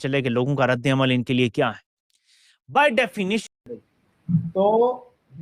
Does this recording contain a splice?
yes; 1 cut; at 3.4 s

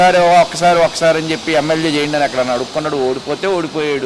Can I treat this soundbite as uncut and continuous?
yes; 0 cuts

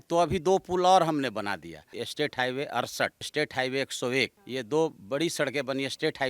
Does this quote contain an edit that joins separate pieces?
yes; 3 cuts; at 1.9 s, 3.3 s, 4.4 s

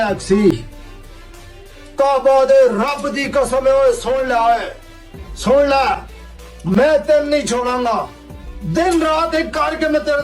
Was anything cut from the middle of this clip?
no; 0 cuts

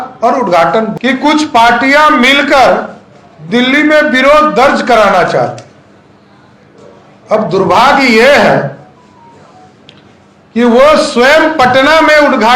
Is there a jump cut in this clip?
yes; 1 cut; at 0.9 s

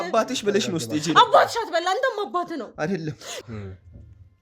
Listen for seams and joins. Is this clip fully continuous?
no; 1 cut; at 3.4 s

